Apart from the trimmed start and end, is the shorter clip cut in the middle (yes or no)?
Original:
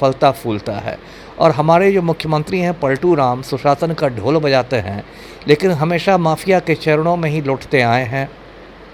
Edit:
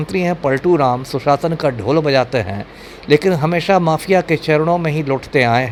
no